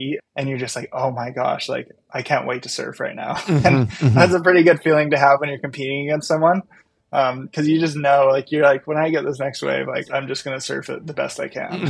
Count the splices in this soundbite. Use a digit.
1